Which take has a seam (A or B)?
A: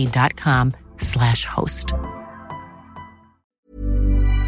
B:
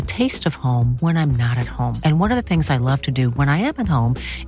A